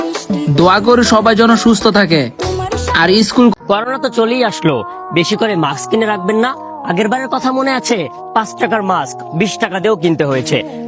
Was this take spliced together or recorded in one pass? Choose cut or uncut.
cut